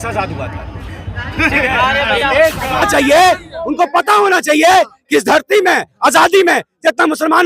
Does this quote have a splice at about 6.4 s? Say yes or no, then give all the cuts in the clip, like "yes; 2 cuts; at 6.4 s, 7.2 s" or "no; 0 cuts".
no; 1 cut; at 2.8 s